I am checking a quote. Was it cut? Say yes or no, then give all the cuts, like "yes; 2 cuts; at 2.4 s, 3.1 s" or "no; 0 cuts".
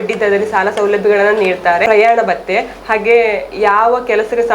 yes; 1 cut; at 1.8 s